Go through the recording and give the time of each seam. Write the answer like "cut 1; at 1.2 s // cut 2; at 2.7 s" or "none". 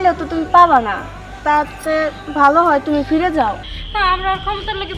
cut 1; at 3.7 s